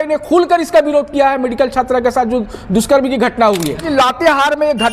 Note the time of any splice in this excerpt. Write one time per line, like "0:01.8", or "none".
0:03.9

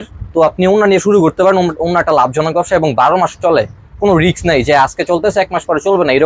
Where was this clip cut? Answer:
none

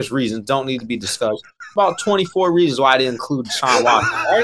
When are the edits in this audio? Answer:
none

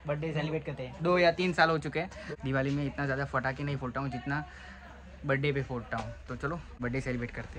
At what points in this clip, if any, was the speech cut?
0:02.2
0:06.7

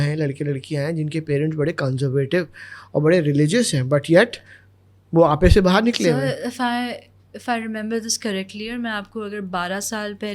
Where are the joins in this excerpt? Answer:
none

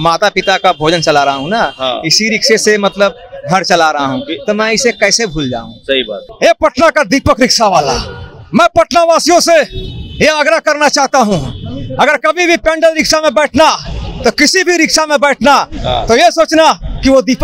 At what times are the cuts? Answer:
0:06.2

